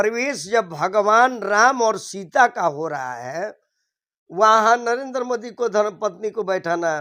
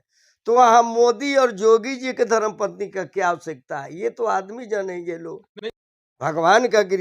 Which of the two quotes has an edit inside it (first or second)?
second